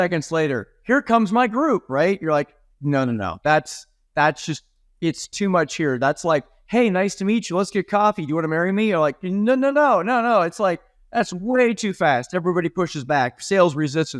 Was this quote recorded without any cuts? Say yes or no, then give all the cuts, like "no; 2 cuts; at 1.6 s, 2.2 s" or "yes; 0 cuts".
yes; 0 cuts